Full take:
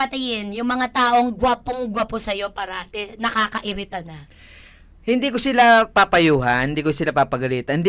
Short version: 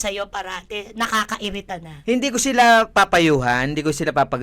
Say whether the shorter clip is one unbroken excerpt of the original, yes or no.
no